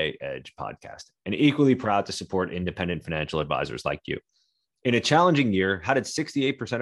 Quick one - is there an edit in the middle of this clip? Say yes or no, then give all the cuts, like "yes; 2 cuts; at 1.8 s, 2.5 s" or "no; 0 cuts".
no; 0 cuts